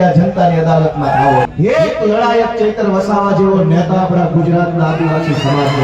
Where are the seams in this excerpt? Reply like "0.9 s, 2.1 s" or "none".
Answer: 1.5 s